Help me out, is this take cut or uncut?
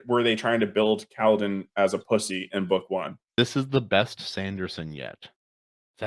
cut